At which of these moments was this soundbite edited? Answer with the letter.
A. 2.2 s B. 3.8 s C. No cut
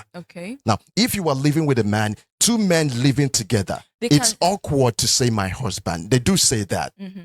C